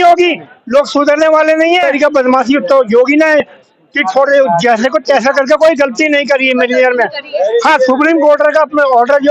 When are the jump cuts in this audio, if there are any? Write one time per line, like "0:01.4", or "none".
0:01.9